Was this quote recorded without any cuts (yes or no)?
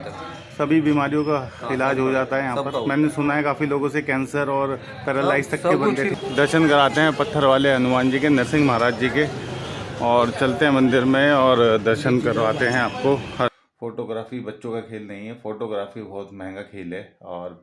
no